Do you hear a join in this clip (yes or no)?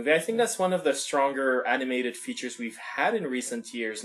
yes